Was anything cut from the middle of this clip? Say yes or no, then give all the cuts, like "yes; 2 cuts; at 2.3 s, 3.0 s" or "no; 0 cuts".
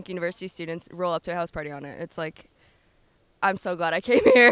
no; 0 cuts